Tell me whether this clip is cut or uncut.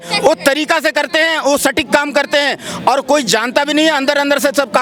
uncut